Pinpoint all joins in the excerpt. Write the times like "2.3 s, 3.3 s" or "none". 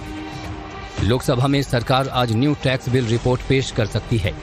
none